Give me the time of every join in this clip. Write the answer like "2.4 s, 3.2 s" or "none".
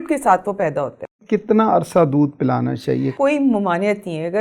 1.2 s, 3.1 s